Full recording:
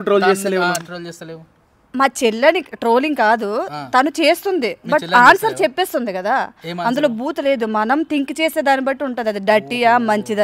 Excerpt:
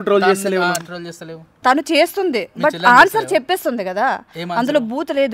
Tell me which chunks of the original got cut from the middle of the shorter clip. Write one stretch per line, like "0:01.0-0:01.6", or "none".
0:01.5-0:03.8